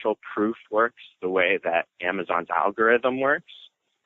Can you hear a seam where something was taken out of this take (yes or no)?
yes